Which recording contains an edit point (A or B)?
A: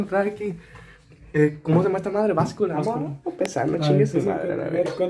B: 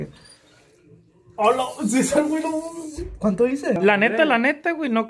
B